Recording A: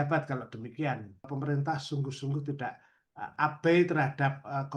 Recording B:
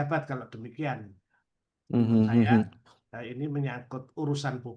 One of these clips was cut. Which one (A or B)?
A